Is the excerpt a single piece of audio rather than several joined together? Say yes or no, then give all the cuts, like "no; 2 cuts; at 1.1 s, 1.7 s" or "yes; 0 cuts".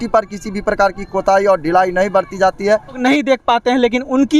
no; 1 cut; at 3.0 s